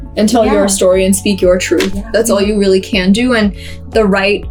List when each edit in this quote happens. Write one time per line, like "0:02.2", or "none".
none